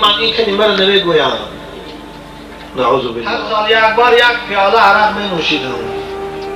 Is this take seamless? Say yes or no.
no